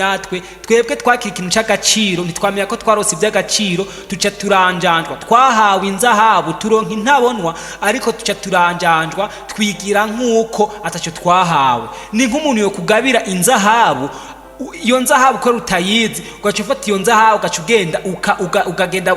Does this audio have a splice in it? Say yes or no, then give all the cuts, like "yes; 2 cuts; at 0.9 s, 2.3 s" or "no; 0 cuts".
no; 0 cuts